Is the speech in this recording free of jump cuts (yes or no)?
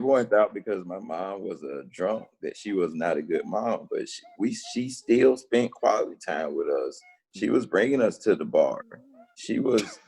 yes